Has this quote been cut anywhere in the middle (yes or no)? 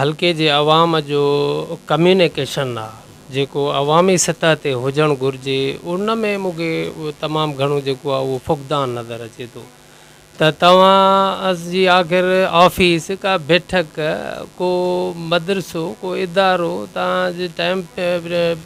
no